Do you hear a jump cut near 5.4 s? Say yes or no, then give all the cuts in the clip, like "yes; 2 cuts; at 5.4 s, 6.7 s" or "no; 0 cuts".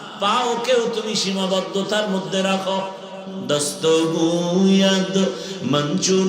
no; 1 cut; at 3.3 s